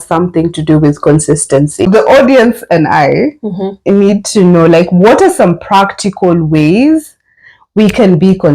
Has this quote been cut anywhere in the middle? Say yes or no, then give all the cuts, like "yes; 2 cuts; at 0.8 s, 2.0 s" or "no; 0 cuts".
yes; 1 cut; at 1.9 s